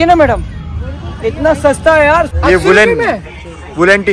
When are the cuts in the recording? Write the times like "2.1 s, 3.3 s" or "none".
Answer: 2.3 s